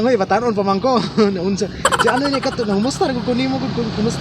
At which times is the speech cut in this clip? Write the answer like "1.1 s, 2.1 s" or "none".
none

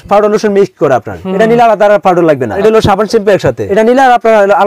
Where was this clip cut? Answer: 2.6 s, 3.6 s

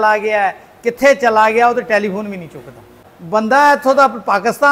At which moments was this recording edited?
3.0 s

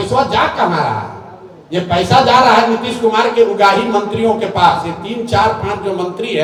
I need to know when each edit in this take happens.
none

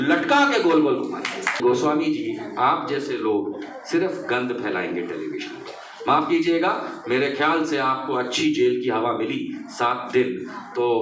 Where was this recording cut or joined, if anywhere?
1.6 s

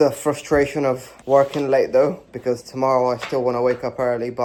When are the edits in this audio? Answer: none

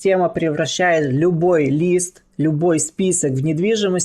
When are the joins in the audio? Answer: none

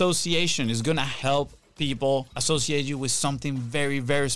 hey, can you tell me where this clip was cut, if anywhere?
1.1 s, 2.4 s

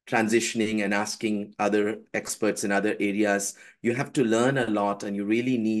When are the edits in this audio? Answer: none

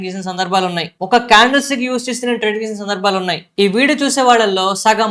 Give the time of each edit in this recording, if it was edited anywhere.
3.4 s

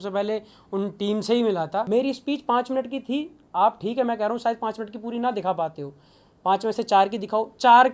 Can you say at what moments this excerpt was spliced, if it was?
1.9 s

